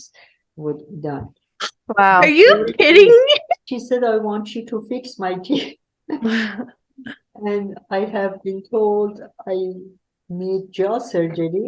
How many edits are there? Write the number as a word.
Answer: one